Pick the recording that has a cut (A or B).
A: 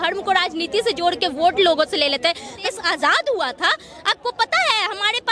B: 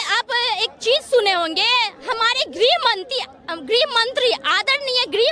A